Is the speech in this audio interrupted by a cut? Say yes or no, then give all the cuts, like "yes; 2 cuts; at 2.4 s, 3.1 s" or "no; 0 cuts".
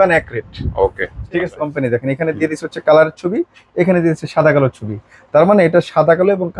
yes; 1 cut; at 1.4 s